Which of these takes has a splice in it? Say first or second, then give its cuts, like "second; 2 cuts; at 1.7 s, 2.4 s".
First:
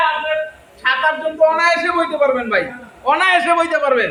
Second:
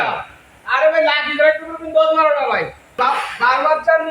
second; 1 cut; at 2.9 s